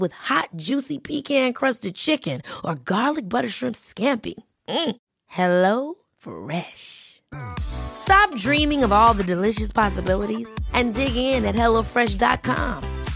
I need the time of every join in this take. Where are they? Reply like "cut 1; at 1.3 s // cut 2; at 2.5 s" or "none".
none